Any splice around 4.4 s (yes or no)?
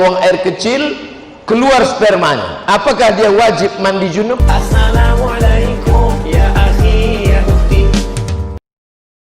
yes